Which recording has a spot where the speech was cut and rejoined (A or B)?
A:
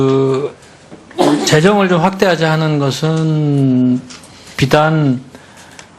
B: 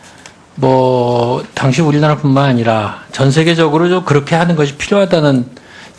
A